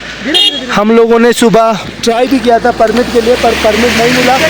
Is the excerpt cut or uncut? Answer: uncut